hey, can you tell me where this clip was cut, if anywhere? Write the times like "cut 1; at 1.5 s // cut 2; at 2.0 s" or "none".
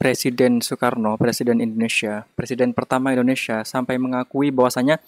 none